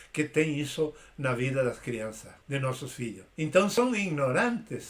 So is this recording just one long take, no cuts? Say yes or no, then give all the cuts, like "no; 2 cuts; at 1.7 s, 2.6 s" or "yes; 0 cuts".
no; 2 cuts; at 2.3 s, 3.7 s